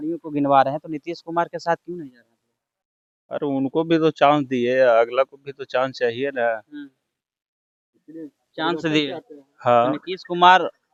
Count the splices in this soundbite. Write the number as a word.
zero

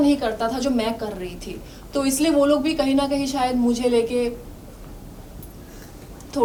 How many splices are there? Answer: zero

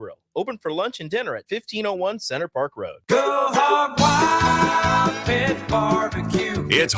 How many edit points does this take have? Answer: one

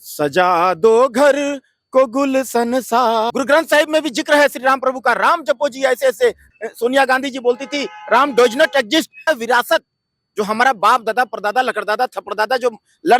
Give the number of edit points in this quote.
three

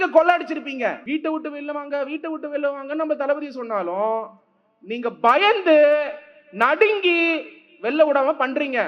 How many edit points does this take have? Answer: one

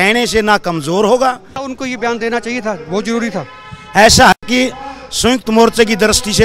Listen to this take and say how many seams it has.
one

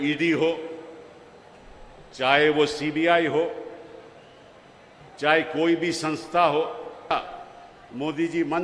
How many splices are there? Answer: one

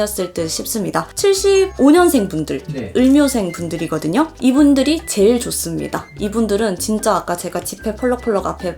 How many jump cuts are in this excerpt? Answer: one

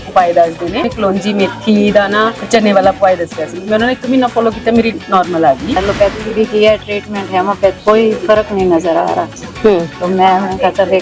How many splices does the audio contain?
four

